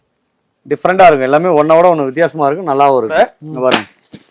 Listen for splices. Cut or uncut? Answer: cut